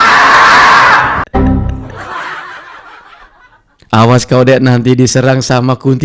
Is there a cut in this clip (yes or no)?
no